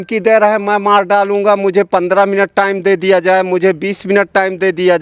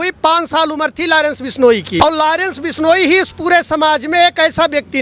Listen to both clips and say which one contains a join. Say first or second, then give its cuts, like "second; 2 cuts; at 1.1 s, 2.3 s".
second; 1 cut; at 2.0 s